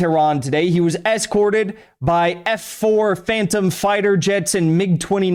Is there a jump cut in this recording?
no; 0 cuts

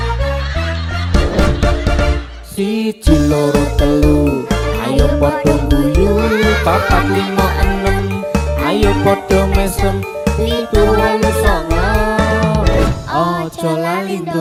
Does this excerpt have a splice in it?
no; 0 cuts

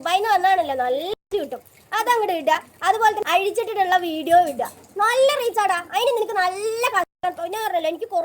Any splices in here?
yes; 1 cut; at 3.2 s

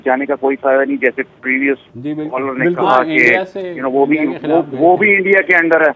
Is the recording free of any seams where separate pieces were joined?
yes; 0 cuts

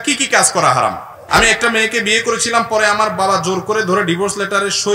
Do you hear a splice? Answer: yes; 1 cut; at 1.0 s

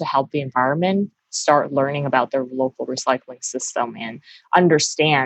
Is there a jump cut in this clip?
no; 0 cuts

